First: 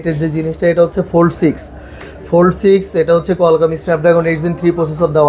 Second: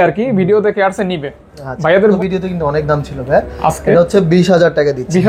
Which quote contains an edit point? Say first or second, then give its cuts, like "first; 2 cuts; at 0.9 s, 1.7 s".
second; 1 cut; at 2.2 s